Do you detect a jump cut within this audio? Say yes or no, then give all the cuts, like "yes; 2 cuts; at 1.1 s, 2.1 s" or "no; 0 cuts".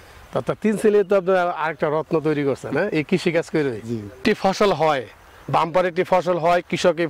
yes; 1 cut; at 4.2 s